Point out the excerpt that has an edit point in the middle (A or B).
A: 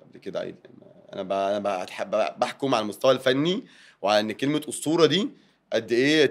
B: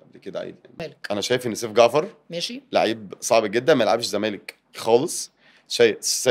B